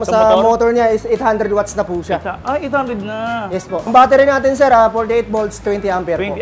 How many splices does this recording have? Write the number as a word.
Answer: one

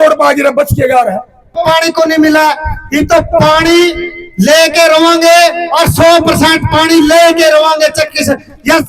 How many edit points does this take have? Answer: one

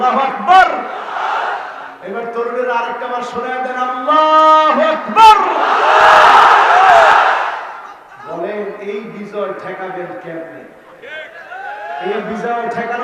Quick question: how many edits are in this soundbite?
one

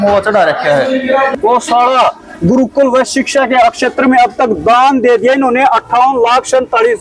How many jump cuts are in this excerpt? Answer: one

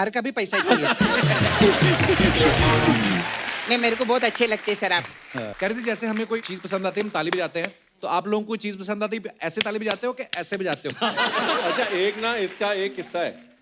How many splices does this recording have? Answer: two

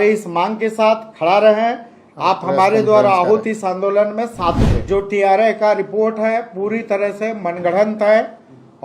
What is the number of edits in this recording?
one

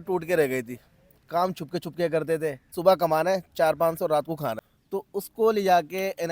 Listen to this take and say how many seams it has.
two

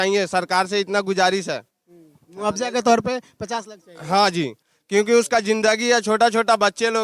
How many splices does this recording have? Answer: zero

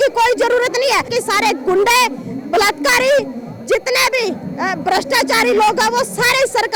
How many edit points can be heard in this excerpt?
one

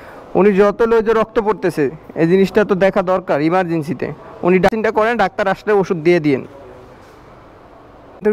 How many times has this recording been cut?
zero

